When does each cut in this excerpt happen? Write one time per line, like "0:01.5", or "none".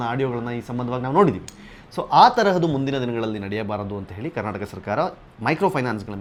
none